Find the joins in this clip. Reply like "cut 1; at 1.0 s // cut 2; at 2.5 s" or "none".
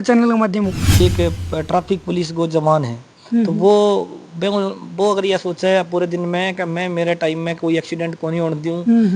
cut 1; at 1.0 s